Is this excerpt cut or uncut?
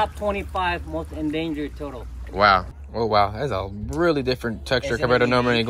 cut